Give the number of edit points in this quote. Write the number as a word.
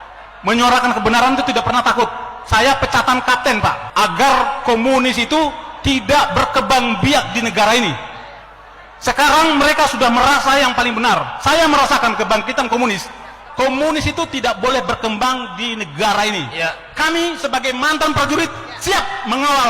two